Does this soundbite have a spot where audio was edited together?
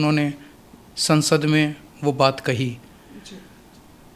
no; 0 cuts

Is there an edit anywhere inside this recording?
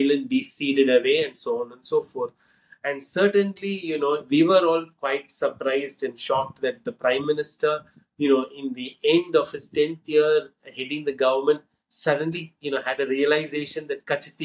no; 0 cuts

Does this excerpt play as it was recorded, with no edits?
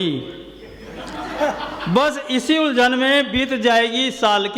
yes; 0 cuts

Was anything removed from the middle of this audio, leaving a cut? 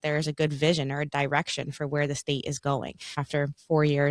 yes; 1 cut; at 3.2 s

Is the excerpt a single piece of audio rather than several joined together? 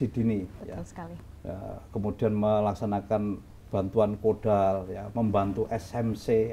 yes; 0 cuts

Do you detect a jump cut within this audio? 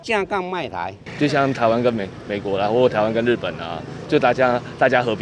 yes; 1 cut; at 1.0 s

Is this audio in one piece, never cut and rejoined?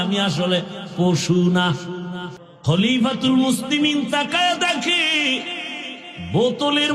no; 1 cut; at 2.5 s

